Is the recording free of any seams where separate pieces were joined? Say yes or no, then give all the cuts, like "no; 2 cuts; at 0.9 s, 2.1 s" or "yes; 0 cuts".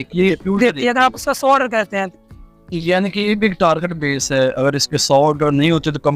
yes; 0 cuts